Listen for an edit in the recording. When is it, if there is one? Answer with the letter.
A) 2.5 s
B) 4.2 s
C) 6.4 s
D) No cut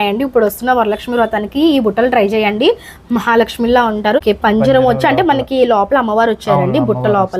B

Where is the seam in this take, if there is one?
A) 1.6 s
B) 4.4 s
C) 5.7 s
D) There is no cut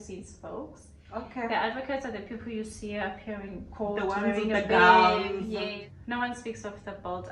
C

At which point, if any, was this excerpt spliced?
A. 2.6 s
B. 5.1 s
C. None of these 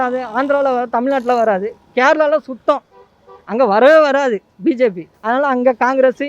B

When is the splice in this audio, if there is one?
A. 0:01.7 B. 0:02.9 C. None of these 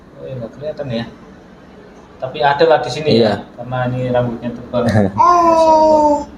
C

